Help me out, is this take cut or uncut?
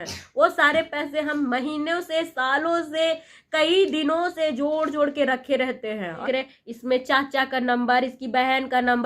cut